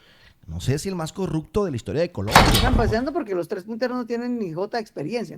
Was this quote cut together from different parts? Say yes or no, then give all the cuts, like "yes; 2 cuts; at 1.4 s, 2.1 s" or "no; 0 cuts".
yes; 1 cut; at 2.6 s